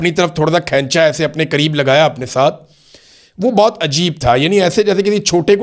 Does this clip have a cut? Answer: no; 0 cuts

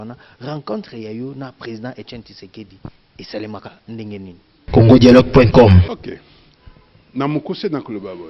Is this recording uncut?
no; 2 cuts; at 4.5 s, 5.9 s

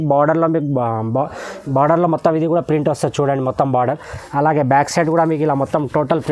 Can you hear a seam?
no; 0 cuts

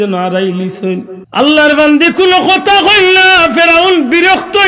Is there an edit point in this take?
yes; 1 cut; at 1.2 s

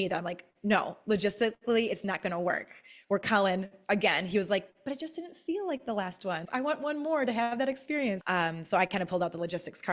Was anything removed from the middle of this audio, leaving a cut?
yes; 2 cuts; at 6.4 s, 8.2 s

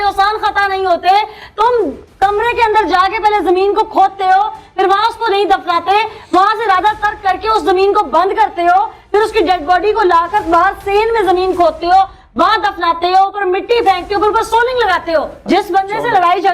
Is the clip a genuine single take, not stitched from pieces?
yes; 0 cuts

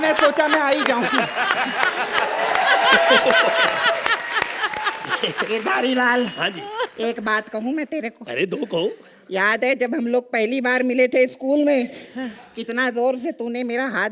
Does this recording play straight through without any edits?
yes; 0 cuts

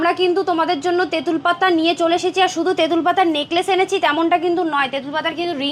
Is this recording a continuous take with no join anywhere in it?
yes; 0 cuts

